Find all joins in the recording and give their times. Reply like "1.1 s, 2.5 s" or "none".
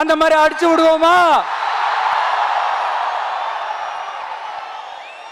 none